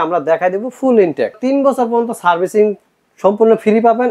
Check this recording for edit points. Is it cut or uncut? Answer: cut